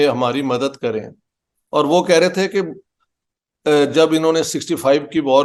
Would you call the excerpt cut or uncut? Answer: uncut